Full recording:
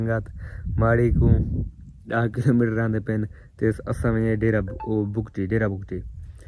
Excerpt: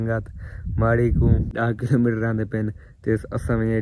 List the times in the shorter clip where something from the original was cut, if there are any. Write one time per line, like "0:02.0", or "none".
0:01.5